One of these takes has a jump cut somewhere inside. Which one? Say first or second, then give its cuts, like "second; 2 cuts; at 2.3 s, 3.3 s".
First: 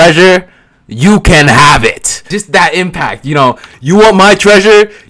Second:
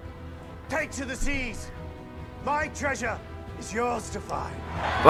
first; 2 cuts; at 2.1 s, 3.7 s